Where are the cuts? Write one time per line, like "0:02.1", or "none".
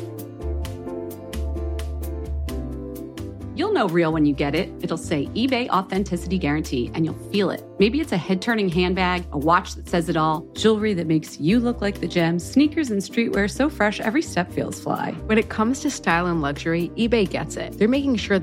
0:01.9